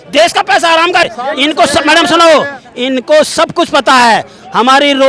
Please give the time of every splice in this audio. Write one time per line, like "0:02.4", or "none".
0:01.0